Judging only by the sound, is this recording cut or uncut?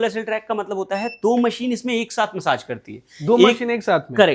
uncut